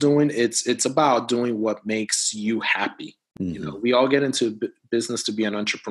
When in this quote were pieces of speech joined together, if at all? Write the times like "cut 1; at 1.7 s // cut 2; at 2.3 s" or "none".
none